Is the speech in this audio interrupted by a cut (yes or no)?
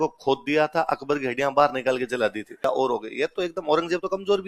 yes